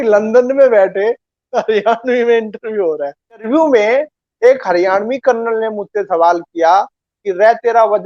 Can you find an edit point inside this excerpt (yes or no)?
yes